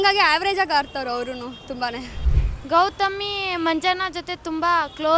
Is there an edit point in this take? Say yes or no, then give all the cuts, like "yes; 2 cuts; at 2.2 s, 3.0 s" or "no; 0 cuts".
yes; 1 cut; at 2.2 s